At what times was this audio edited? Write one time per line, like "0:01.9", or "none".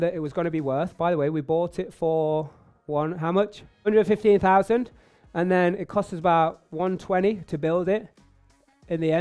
none